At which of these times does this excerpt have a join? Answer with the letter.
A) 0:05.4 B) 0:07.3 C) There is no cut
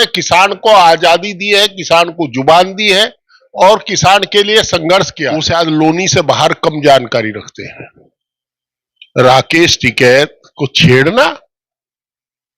A